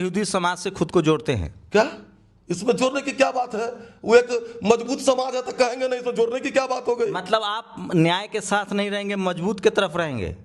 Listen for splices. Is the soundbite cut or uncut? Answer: uncut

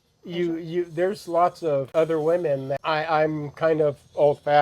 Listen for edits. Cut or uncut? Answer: cut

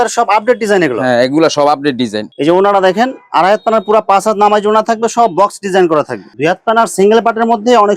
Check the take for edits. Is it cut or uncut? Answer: cut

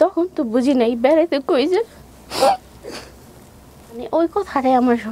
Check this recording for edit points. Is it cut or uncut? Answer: cut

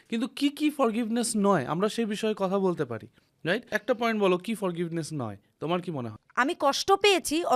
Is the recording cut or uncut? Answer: cut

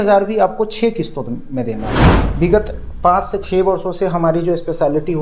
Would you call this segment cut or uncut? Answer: cut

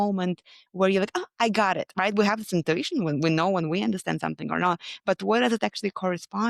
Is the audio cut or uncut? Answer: uncut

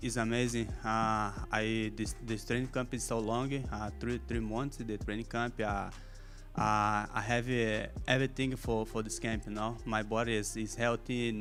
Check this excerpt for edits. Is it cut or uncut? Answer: uncut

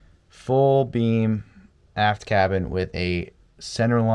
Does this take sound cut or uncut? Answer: uncut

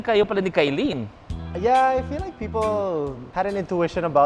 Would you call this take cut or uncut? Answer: uncut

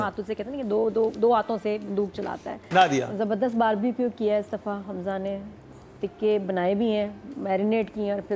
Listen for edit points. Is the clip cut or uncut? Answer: cut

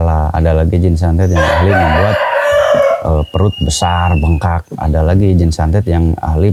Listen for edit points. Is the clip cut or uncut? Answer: uncut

